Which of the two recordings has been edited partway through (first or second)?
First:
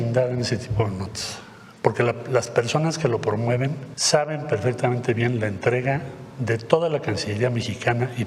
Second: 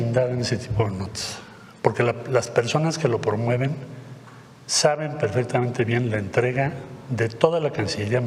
first